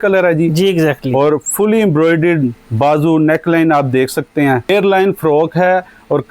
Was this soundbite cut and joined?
yes; 1 cut; at 4.7 s

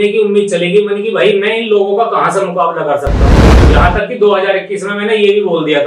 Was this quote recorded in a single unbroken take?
no; 1 cut; at 3.5 s

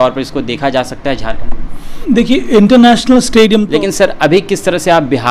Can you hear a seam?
yes; 2 cuts; at 2.0 s, 3.7 s

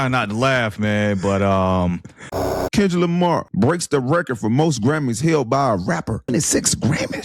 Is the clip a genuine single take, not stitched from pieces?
no; 3 cuts; at 2.6 s, 3.5 s, 6.3 s

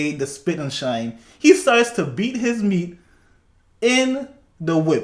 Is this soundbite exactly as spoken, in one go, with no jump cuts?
yes; 0 cuts

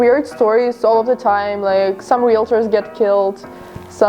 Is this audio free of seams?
yes; 0 cuts

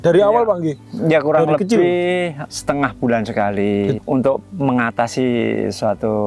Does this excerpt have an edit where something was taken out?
yes; 2 cuts; at 2.4 s, 4.0 s

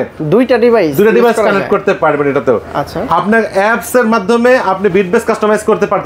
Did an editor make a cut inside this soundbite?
no; 0 cuts

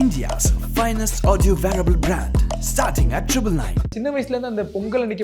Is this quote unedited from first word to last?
no; 1 cut; at 3.9 s

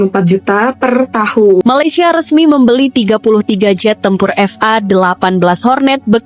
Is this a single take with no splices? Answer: no; 1 cut; at 1.6 s

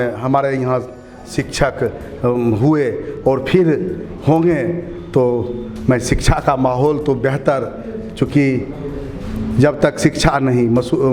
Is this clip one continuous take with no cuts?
yes; 0 cuts

